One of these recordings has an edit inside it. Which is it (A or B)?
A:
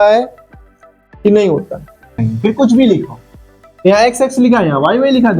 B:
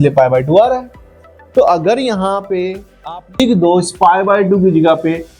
A